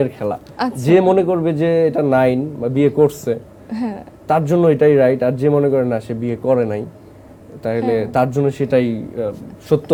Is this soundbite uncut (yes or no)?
yes